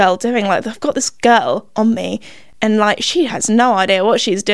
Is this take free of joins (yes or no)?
yes